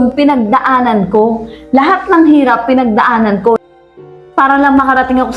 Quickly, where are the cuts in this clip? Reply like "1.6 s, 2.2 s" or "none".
none